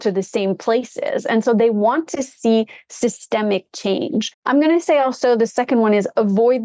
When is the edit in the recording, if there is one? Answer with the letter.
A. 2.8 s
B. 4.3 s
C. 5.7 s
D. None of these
B